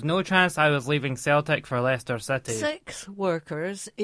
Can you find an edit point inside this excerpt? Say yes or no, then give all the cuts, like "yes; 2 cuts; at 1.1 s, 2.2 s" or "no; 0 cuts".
yes; 1 cut; at 2.6 s